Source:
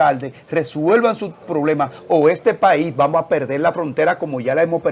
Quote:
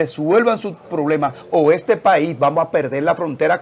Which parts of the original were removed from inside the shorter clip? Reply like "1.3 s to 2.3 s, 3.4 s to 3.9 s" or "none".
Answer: none

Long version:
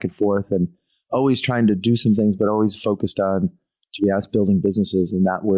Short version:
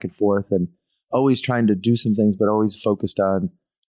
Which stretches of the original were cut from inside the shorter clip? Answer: none

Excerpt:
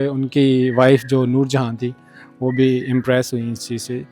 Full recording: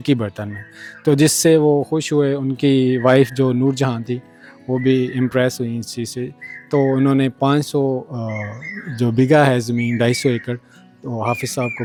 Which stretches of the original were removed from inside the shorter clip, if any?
none

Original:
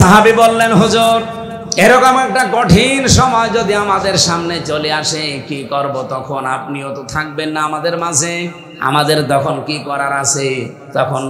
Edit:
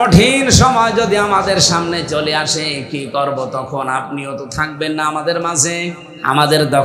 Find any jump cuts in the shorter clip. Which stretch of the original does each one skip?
none

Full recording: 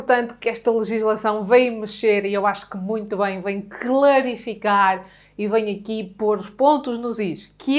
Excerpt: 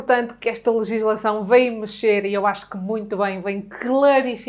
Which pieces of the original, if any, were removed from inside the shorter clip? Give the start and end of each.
none

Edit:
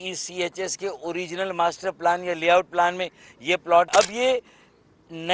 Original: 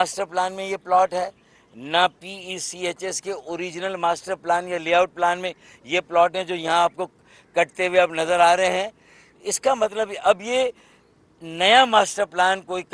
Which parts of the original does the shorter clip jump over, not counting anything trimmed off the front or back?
6.3 s to 10.2 s

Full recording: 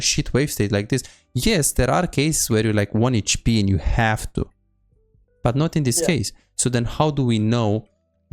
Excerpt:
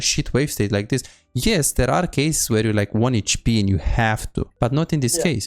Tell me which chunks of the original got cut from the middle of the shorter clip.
4.5 s to 5.3 s

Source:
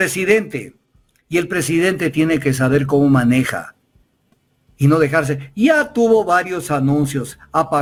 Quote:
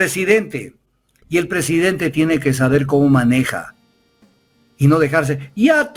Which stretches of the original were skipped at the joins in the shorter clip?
none

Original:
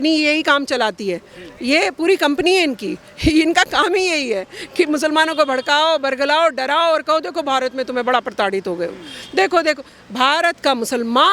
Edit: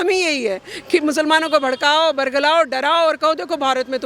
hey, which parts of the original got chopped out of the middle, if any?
none

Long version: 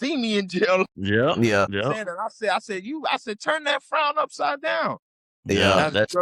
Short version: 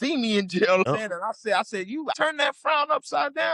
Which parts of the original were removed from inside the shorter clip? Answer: 1.0 s to 1.9 s, 3.1 s to 3.4 s

